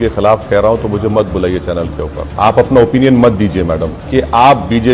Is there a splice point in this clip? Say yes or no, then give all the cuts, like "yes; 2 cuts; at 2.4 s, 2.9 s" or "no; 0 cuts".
yes; 2 cuts; at 2.3 s, 3.9 s